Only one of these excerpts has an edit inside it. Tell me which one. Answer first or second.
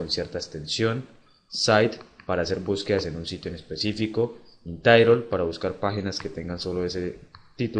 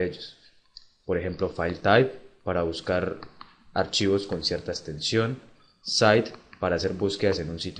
first